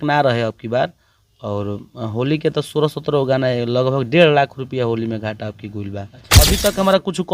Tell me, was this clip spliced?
yes; 1 cut; at 6.2 s

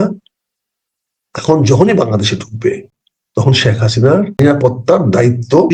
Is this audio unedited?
no; 1 cut; at 4.4 s

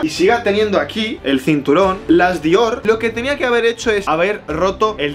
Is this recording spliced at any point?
yes; 1 cut; at 2.8 s

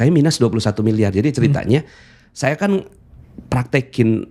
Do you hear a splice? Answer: no; 0 cuts

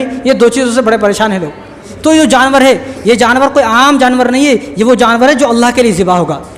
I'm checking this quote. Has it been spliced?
yes; 1 cut; at 1.9 s

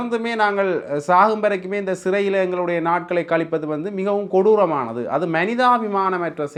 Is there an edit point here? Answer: no; 0 cuts

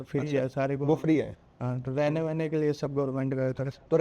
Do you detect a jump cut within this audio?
no; 0 cuts

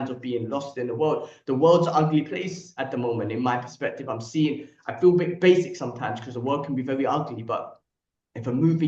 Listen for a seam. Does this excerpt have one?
no; 0 cuts

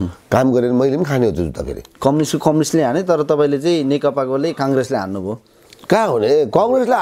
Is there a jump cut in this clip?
no; 0 cuts

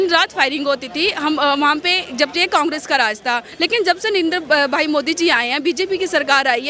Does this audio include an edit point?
yes; 1 cut; at 3.5 s

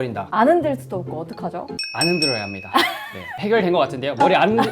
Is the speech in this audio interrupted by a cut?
no; 0 cuts

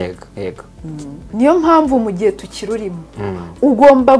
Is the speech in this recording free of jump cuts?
no; 1 cut; at 1.3 s

